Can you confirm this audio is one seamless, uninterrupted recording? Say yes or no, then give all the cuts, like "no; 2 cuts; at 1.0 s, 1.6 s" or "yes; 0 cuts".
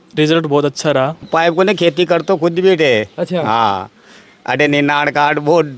no; 1 cut; at 1.3 s